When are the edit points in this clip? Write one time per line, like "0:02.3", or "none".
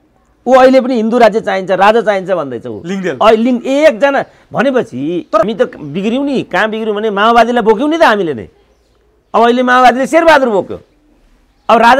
0:05.4